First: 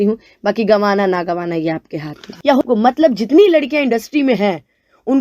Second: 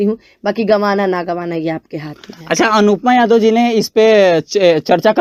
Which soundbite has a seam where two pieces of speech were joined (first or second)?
first